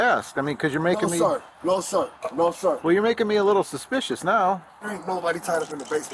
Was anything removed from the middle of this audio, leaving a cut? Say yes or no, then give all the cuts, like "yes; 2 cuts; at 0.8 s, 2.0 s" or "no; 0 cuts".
yes; 1 cut; at 4.7 s